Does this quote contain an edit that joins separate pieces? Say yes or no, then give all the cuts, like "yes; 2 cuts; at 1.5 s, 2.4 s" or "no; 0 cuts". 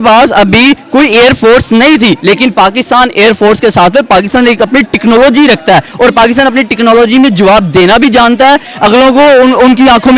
no; 0 cuts